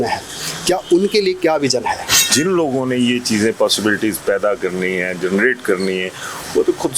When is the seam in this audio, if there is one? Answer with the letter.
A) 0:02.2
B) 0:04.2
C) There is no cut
A